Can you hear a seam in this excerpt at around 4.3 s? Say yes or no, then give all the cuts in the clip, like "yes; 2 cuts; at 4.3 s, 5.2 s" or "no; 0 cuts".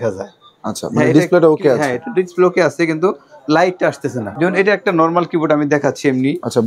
yes; 1 cut; at 4.3 s